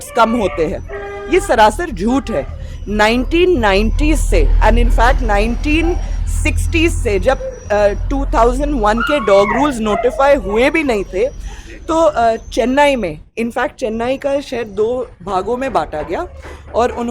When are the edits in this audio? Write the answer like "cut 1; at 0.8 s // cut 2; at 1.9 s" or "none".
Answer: none

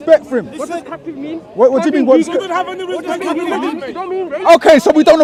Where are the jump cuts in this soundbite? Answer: none

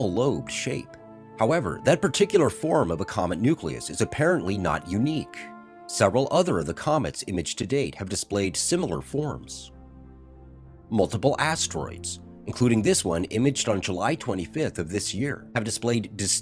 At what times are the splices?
cut 1; at 6.8 s

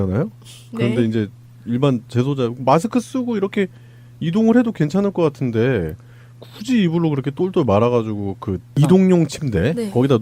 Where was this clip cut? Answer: cut 1; at 8.4 s

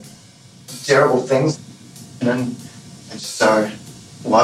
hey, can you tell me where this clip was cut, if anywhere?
cut 1; at 1.5 s

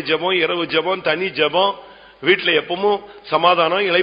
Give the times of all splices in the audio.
none

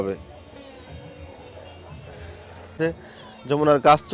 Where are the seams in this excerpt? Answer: cut 1; at 2.8 s

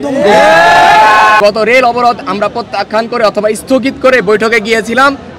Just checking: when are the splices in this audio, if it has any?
cut 1; at 1.4 s

